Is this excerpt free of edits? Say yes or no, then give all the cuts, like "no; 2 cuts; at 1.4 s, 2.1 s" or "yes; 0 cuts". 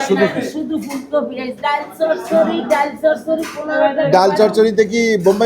no; 1 cut; at 1.6 s